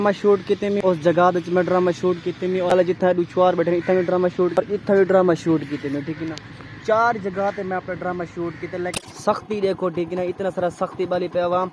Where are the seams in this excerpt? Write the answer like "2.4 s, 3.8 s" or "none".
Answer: 0.9 s, 2.7 s, 5.0 s, 9.0 s